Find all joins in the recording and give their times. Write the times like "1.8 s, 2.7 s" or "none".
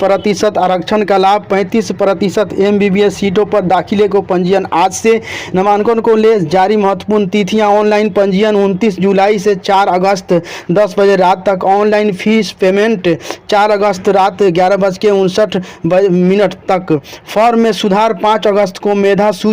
none